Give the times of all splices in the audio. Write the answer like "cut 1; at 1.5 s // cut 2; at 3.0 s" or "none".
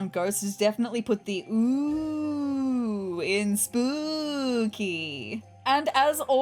cut 1; at 5.5 s